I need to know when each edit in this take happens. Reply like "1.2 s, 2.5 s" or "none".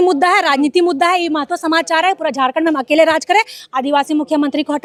none